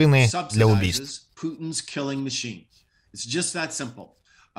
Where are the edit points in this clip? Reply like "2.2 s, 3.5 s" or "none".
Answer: none